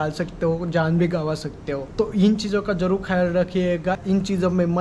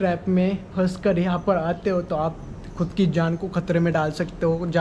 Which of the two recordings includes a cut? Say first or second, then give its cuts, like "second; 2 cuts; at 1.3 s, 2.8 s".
first; 2 cuts; at 1.8 s, 4.0 s